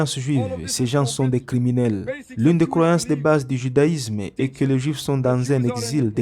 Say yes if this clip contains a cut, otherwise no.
yes